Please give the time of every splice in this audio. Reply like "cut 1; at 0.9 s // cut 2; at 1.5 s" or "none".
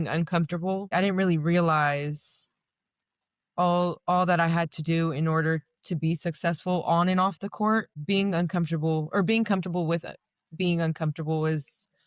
cut 1; at 0.9 s // cut 2; at 7.9 s